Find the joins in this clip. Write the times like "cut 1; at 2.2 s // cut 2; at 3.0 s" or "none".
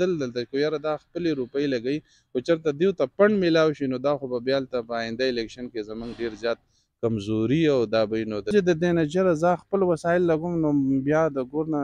cut 1; at 8.5 s